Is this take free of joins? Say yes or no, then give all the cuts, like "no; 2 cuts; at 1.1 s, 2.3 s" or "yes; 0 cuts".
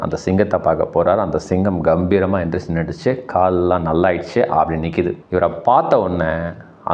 no; 1 cut; at 5.2 s